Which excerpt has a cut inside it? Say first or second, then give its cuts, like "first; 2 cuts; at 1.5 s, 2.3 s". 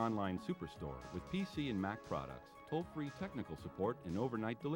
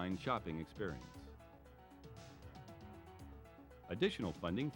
second; 2 cuts; at 1.0 s, 3.6 s